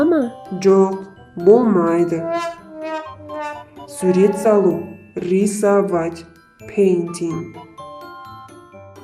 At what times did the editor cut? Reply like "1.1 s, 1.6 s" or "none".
3.0 s